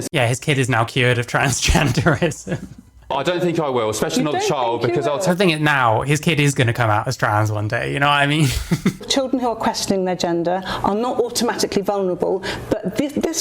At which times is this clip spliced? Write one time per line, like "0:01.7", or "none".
0:03.1
0:09.0